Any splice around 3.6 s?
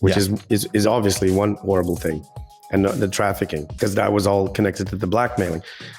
yes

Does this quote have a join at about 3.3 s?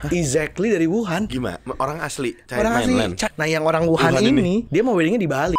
yes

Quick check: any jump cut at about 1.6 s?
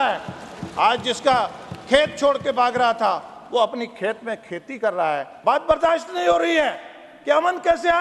no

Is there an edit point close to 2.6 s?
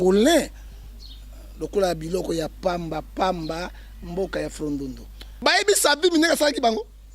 no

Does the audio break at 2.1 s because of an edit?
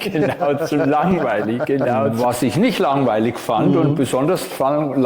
yes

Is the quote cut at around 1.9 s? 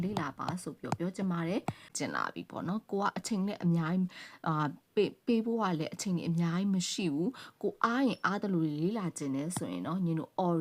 yes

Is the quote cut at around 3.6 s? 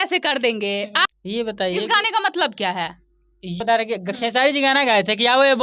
yes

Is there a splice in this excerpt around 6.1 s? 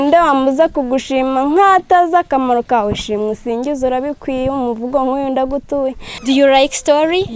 yes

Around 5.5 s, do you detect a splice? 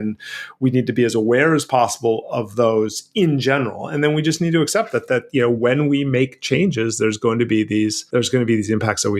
no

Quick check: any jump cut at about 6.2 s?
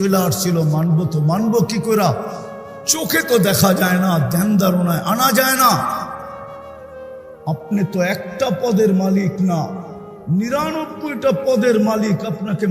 yes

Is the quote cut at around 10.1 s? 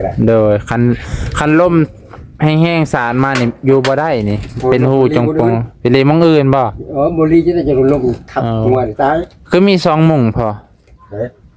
no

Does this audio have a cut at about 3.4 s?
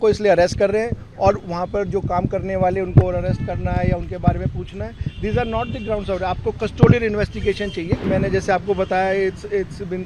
no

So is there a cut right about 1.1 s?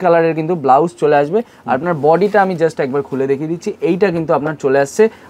no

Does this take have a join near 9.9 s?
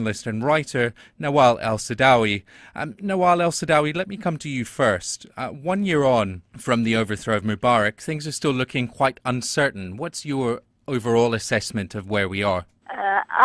no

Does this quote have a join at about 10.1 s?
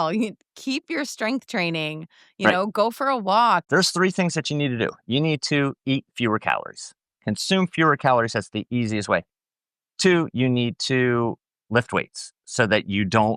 no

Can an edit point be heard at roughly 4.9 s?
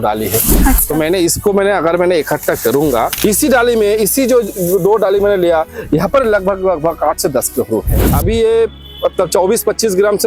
no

